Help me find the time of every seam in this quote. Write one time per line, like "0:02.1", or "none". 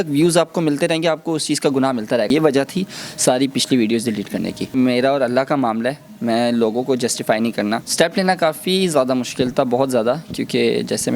0:02.3
0:04.7
0:07.8

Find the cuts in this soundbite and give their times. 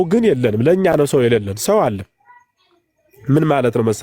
none

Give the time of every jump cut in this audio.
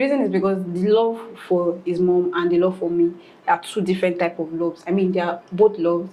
none

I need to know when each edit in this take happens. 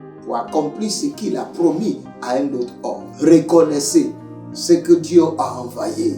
0:03.0

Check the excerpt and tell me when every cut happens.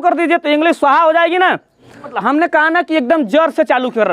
0:02.1

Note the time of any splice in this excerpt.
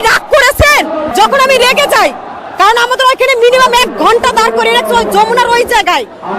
0:01.1

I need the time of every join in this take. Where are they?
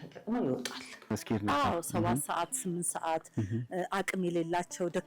0:01.1

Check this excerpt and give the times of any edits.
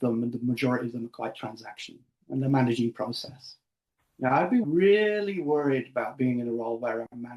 0:04.6

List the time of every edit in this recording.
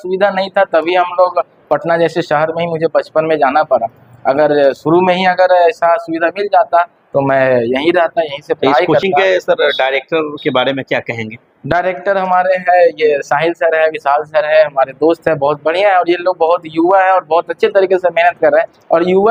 none

